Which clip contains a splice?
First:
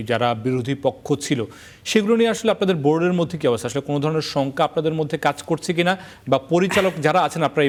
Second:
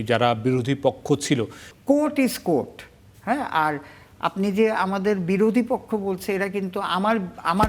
second; 1 cut; at 1.6 s

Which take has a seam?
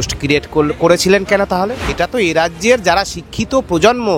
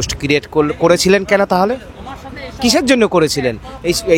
first; 1 cut; at 1.9 s

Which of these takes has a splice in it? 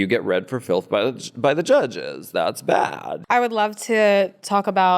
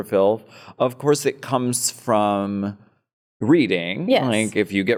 first; 1 cut; at 3.1 s

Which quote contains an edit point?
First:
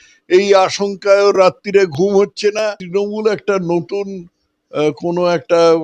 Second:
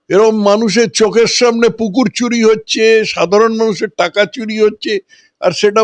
first; 1 cut; at 2.8 s

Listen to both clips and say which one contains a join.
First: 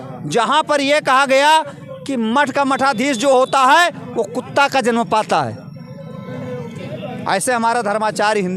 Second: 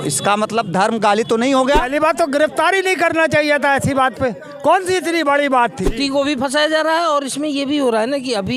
second; 2 cuts; at 1.9 s, 5.9 s

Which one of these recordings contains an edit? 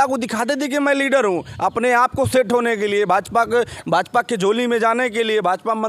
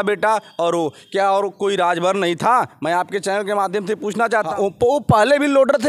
second; 1 cut; at 4.5 s

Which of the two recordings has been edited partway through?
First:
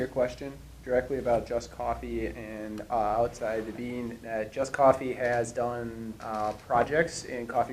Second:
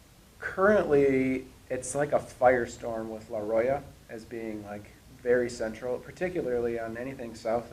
first; 1 cut; at 1.2 s

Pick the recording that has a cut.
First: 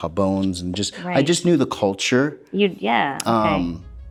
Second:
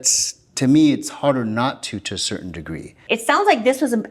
second; 1 cut; at 3.0 s

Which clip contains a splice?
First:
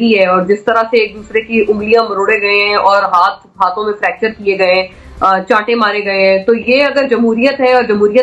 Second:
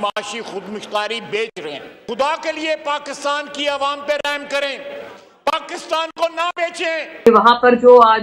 second; 2 cuts; at 1.9 s, 7.2 s

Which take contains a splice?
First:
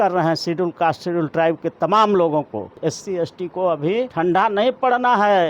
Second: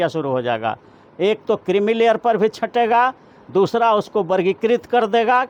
first; 2 cuts; at 2.7 s, 4.1 s

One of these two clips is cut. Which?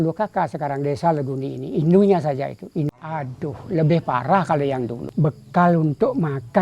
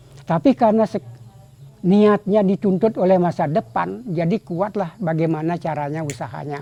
first; 2 cuts; at 2.9 s, 5.0 s

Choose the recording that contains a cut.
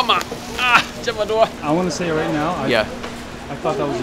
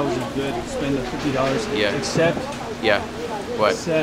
first; 1 cut; at 1.6 s

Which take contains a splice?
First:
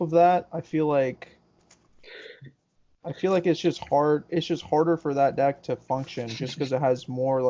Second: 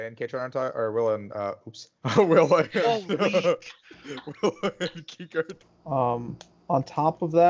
second; 1 cut; at 5.6 s

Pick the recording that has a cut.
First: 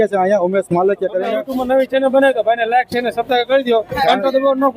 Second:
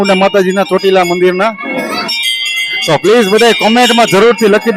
first; 1 cut; at 1.4 s

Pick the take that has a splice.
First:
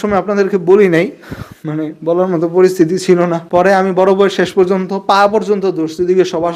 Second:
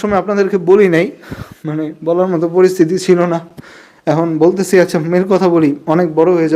first; 1 cut; at 3.4 s

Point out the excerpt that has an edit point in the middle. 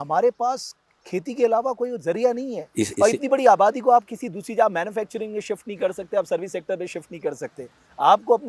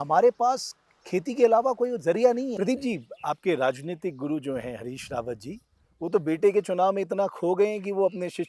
second; 1 cut; at 2.5 s

